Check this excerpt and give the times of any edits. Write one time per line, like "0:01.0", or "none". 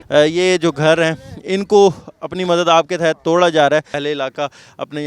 0:04.0